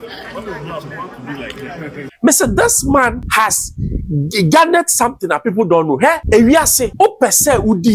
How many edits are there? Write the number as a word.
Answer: four